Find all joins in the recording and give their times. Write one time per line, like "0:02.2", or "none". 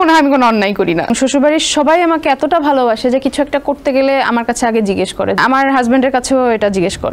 0:01.1
0:05.4